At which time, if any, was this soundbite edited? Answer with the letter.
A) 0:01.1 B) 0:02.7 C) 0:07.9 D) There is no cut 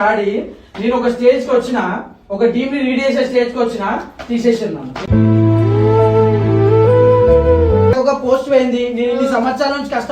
C